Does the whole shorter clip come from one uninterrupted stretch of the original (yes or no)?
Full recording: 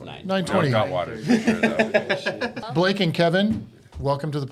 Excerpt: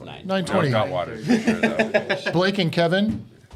no